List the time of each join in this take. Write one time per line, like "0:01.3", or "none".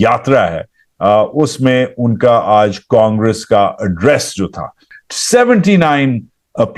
0:04.8